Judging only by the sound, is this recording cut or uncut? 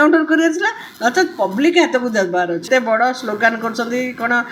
cut